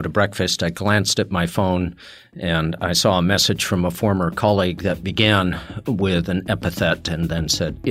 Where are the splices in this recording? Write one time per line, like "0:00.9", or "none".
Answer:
none